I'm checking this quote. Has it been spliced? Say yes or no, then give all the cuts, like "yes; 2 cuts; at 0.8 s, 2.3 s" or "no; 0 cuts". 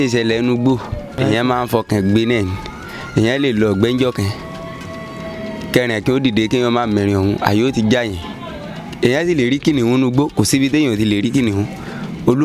yes; 1 cut; at 1.2 s